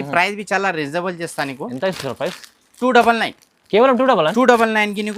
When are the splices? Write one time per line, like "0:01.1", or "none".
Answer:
none